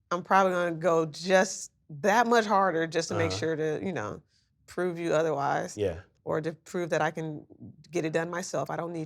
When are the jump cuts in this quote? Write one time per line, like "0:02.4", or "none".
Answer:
0:06.1